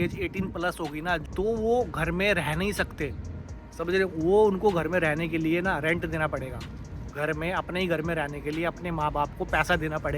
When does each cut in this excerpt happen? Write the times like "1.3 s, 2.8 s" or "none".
1.2 s